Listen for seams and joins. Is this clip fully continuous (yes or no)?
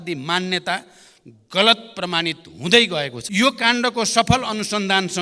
no